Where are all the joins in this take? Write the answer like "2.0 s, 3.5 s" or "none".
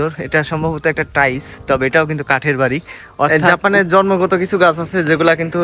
3.3 s